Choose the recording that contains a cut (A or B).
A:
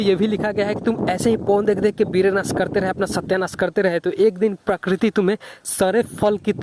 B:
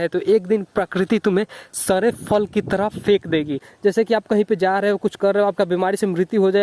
B